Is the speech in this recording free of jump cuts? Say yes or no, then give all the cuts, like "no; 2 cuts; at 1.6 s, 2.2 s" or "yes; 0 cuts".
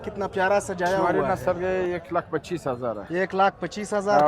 no; 1 cut; at 1.1 s